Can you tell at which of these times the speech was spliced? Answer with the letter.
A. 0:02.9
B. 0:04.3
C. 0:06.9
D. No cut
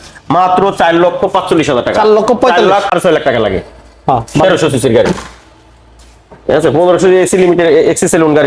A